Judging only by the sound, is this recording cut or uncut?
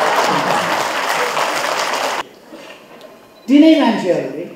uncut